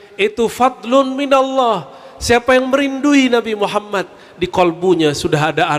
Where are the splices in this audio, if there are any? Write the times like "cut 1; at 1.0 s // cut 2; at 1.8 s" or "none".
none